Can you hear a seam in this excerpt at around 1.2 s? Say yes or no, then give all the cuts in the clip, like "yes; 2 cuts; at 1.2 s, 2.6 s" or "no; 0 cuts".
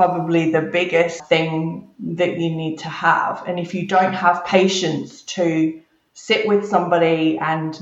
yes; 1 cut; at 1.2 s